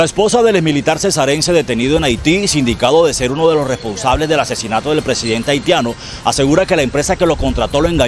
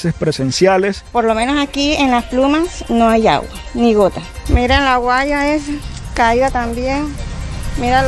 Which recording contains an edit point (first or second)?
second